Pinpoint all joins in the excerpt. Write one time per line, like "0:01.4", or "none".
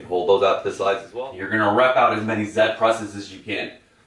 0:01.1